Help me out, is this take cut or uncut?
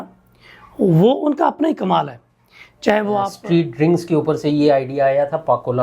cut